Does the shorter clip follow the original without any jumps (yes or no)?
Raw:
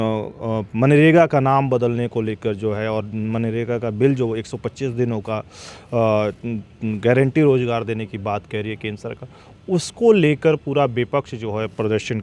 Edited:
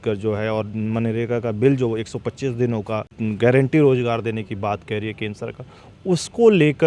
no